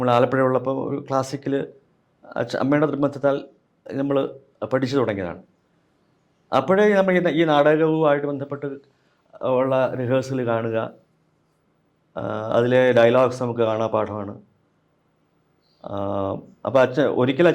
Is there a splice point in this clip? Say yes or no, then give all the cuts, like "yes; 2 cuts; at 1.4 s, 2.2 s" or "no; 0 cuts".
no; 0 cuts